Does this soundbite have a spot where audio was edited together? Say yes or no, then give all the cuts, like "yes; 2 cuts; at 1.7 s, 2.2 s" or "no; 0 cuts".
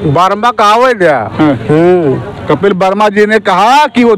no; 0 cuts